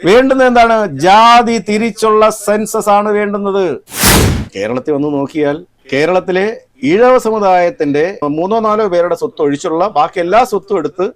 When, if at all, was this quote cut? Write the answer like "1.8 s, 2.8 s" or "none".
4.1 s